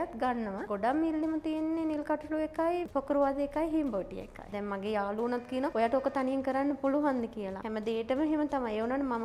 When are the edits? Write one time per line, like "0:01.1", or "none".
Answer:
0:04.5